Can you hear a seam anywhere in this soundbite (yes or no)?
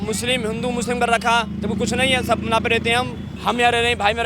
yes